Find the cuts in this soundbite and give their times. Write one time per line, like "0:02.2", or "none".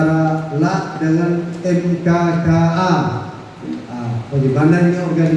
none